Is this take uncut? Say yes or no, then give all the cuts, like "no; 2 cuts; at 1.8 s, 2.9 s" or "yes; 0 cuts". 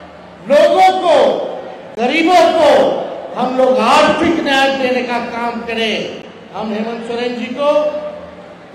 yes; 0 cuts